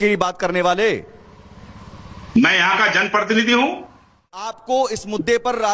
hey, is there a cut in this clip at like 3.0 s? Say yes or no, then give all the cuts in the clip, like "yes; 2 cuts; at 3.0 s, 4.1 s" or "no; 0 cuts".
no; 1 cut; at 4.6 s